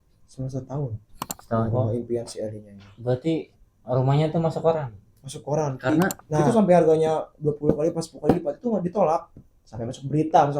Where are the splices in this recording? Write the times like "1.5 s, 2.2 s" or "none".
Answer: 1.6 s, 6.4 s

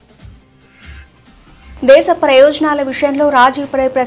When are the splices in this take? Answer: 1.8 s

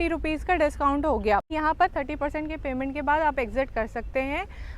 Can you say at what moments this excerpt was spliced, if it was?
1.5 s

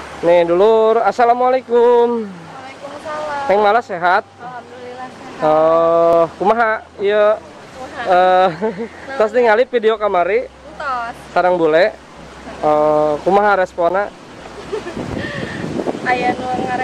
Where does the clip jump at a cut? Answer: none

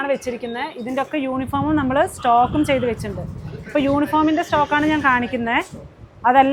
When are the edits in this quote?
none

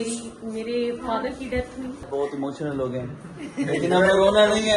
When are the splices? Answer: 2.0 s

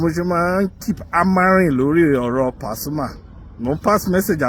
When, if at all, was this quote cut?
none

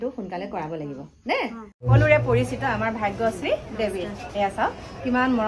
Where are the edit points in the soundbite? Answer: 1.9 s

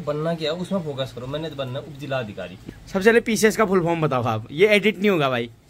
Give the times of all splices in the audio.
2.5 s

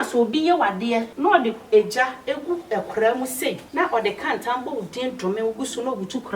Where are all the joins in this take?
1.1 s, 3.6 s

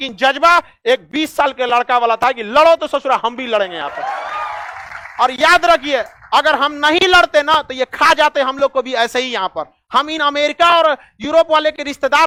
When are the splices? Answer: none

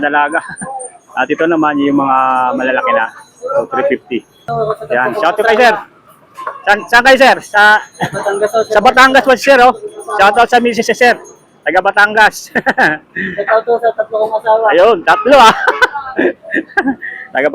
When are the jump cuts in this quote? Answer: 4.5 s

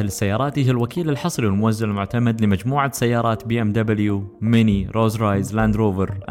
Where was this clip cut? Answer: none

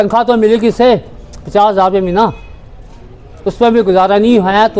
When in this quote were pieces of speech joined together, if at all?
none

